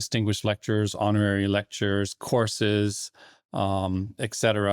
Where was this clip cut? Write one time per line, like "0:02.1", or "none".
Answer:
none